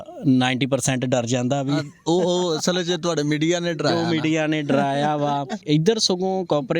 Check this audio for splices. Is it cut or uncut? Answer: cut